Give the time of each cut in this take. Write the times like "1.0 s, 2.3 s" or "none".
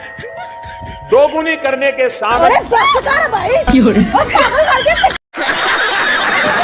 5.3 s

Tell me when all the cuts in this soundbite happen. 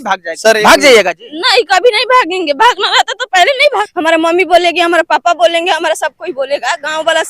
3.6 s

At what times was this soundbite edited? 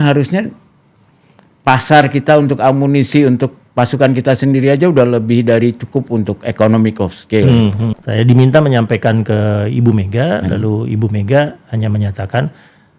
7.9 s

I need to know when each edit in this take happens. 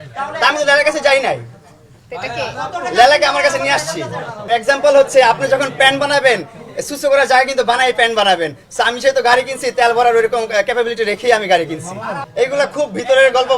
4.3 s, 12.1 s

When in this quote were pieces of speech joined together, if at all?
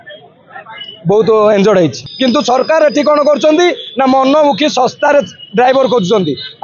2.0 s

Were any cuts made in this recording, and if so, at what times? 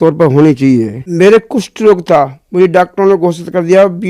1.0 s

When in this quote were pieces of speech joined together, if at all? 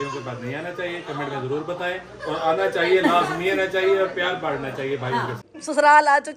5.4 s

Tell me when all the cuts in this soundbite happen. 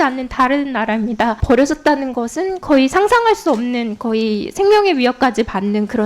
1.4 s

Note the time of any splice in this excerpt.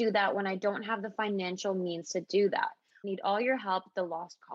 2.9 s

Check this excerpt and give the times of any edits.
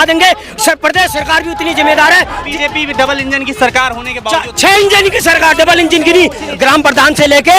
2.5 s, 6.5 s

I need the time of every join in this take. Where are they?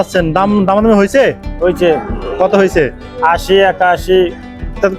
none

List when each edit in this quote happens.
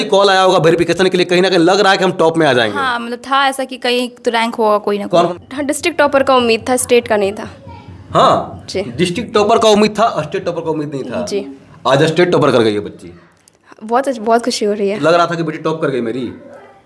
5.3 s, 15.0 s

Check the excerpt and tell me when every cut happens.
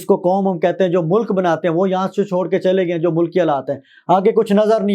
none

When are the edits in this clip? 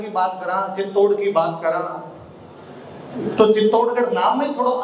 none

